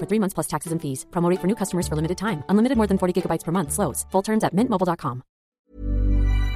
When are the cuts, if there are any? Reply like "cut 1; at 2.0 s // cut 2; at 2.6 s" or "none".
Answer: cut 1; at 5.5 s